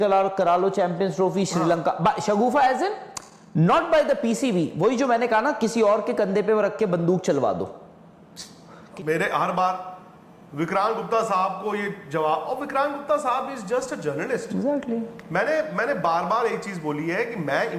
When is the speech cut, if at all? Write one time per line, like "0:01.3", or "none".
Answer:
none